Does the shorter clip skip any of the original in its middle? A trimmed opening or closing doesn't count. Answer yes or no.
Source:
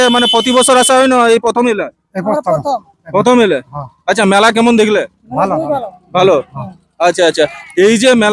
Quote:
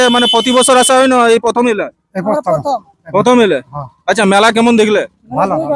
no